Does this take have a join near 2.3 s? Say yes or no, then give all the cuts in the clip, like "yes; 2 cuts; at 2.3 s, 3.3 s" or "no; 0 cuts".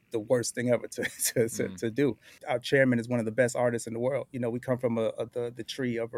yes; 1 cut; at 2.3 s